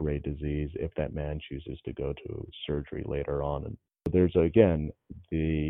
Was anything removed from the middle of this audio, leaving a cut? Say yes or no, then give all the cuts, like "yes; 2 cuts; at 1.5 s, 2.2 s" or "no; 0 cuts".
yes; 1 cut; at 4.1 s